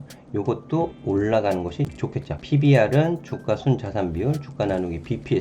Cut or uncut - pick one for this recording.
cut